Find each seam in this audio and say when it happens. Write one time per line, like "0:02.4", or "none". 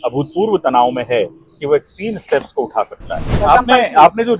0:03.4